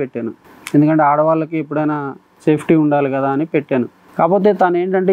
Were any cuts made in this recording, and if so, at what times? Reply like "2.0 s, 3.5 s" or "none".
none